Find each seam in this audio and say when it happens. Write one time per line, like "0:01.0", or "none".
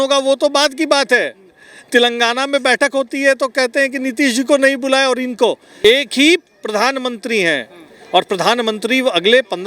0:05.7